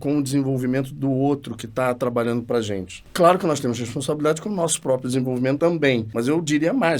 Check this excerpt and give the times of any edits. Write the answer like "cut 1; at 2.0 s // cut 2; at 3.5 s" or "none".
cut 1; at 3.0 s // cut 2; at 5.7 s